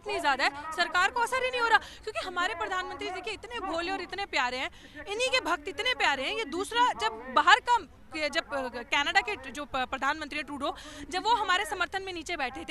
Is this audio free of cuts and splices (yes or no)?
yes